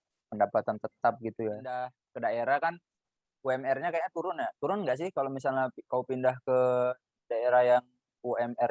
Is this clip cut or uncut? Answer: cut